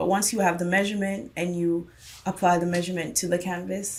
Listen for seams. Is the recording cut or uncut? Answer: uncut